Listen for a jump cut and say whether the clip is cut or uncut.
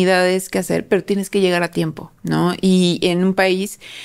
uncut